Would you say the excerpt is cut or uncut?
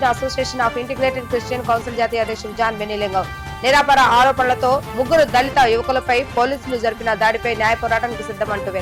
uncut